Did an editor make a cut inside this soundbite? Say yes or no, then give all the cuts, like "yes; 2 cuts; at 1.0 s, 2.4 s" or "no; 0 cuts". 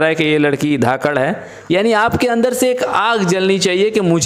yes; 1 cut; at 1.5 s